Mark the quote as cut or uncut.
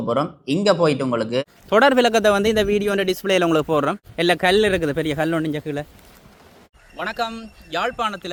uncut